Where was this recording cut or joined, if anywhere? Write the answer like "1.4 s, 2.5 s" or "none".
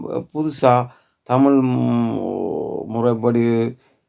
none